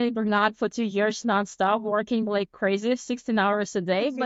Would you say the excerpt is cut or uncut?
uncut